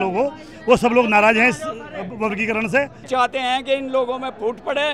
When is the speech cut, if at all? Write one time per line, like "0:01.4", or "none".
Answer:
0:03.0